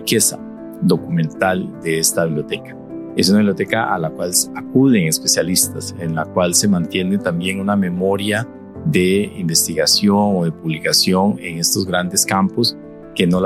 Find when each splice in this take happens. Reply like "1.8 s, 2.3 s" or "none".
none